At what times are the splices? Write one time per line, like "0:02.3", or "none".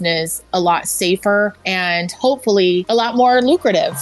0:01.7
0:02.8